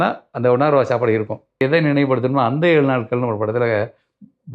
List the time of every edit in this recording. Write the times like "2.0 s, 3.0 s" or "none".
1.6 s